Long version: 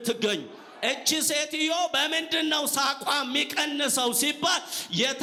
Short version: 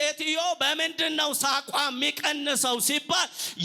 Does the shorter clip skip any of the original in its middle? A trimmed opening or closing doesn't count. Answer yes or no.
no